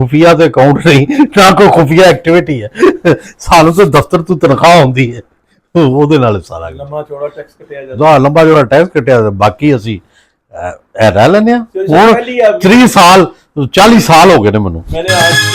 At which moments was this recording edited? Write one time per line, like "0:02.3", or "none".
none